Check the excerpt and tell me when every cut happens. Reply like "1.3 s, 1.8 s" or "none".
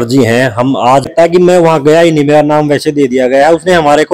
1.1 s